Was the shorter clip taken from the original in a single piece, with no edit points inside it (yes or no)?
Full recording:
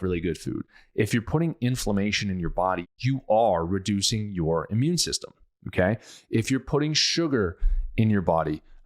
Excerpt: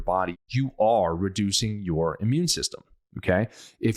yes